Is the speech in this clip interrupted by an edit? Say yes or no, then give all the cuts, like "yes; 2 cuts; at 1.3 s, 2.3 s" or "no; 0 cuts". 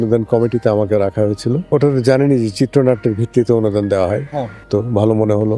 yes; 2 cuts; at 1.6 s, 4.7 s